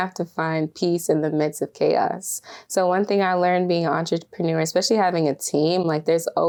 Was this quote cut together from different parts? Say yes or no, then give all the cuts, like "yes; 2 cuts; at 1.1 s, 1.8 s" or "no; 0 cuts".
no; 0 cuts